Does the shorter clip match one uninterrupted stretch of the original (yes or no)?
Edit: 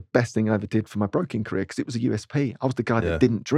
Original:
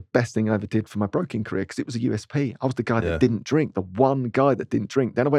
yes